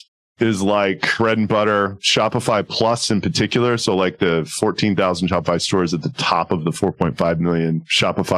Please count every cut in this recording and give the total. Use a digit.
1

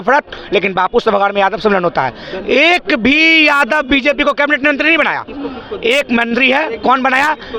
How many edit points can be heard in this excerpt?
0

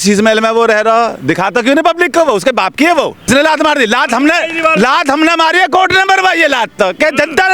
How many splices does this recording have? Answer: 1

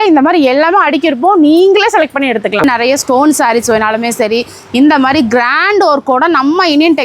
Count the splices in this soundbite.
1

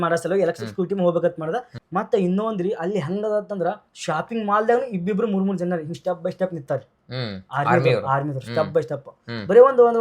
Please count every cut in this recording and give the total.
1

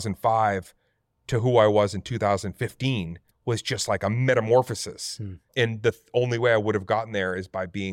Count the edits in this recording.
2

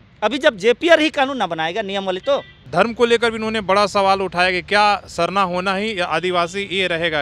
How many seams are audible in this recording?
1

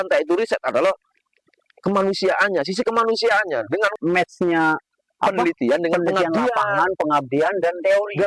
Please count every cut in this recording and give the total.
1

